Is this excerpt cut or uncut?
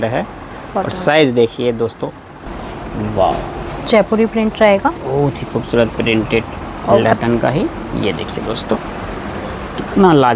cut